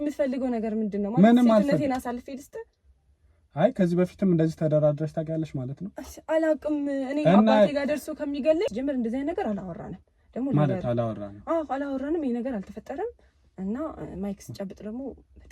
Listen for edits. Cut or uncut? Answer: cut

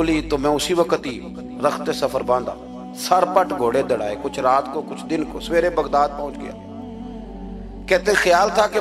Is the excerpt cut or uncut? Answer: uncut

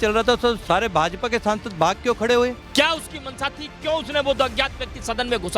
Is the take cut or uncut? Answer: cut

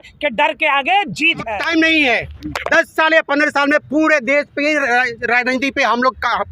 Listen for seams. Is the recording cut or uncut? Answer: cut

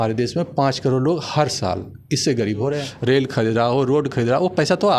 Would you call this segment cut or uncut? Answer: cut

